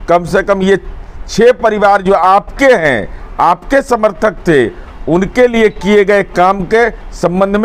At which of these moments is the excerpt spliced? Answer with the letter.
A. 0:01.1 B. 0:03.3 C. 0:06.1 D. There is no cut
D